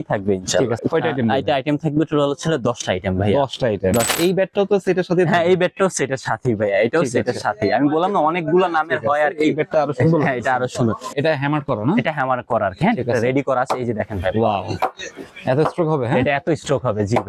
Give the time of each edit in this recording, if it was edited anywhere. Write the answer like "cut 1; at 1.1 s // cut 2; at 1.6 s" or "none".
cut 1; at 0.8 s // cut 2; at 4.1 s // cut 3; at 11.1 s